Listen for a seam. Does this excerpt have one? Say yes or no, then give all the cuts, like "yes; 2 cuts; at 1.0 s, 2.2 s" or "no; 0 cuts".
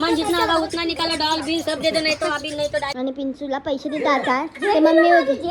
yes; 1 cut; at 2.9 s